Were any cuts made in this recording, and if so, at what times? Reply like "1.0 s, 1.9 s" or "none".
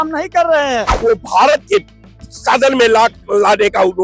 0.9 s